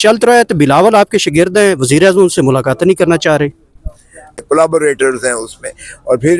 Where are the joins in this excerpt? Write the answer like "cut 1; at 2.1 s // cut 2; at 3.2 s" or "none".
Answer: cut 1; at 4.4 s